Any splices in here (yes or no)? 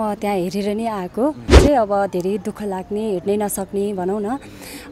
yes